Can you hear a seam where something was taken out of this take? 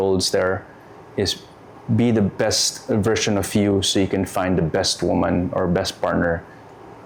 no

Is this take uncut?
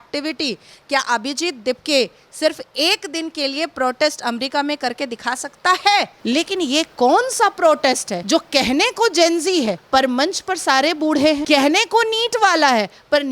no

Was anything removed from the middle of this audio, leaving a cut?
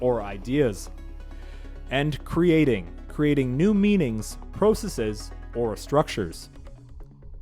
yes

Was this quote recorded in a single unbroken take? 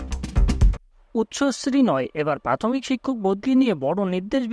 yes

